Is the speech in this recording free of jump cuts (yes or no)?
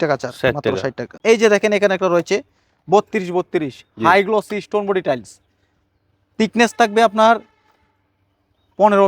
no